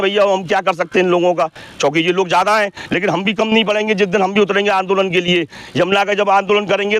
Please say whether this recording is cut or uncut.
uncut